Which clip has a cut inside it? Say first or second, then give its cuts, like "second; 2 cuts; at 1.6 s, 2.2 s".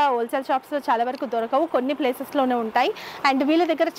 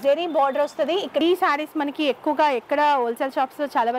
second; 1 cut; at 1.2 s